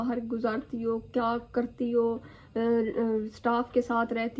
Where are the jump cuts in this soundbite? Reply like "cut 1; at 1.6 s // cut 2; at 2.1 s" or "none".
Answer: none